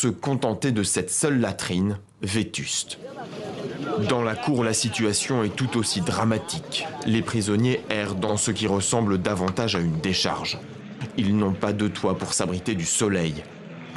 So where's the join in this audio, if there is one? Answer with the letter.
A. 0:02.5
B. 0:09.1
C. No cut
C